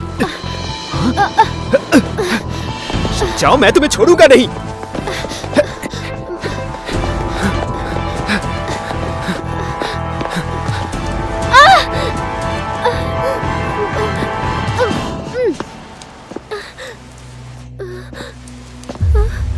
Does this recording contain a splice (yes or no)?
no